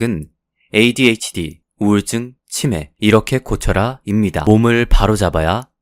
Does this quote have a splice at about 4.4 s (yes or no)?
yes